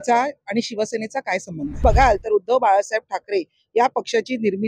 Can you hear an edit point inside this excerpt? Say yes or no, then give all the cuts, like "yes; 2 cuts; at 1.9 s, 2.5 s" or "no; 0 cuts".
yes; 1 cut; at 1.8 s